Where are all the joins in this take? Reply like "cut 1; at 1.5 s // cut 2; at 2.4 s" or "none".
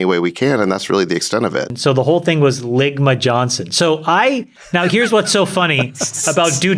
cut 1; at 1.7 s // cut 2; at 4.5 s

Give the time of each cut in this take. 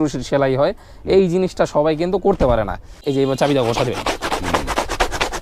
cut 1; at 3.0 s

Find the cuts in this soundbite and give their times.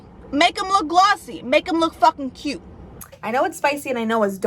cut 1; at 2.9 s

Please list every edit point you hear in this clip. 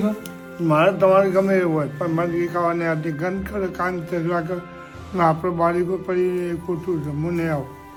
none

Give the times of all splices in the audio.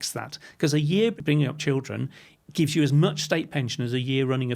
cut 1; at 1.1 s

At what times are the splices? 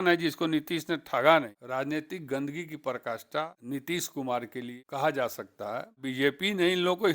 cut 1; at 1.6 s // cut 2; at 3.6 s // cut 3; at 4.7 s // cut 4; at 6.0 s

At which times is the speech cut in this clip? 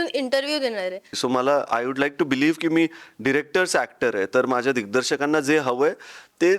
cut 1; at 1.2 s

